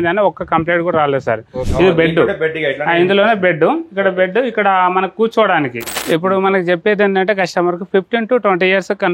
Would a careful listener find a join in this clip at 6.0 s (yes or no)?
yes